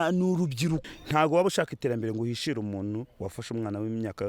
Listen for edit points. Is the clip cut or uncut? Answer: cut